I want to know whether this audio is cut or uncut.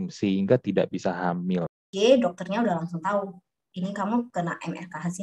cut